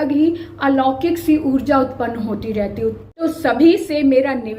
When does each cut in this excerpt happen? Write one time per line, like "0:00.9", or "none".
0:03.2